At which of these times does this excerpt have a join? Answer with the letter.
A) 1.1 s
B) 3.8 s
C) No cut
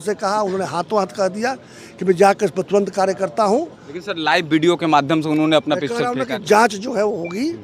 B